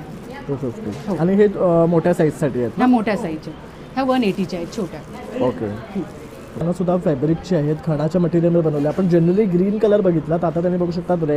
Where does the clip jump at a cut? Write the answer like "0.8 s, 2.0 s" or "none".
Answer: 6.6 s